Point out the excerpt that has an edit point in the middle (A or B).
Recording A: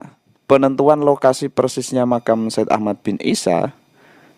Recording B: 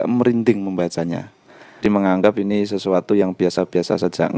B